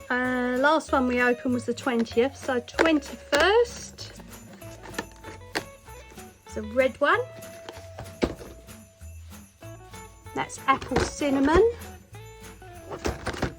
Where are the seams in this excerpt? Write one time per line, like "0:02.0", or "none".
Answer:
none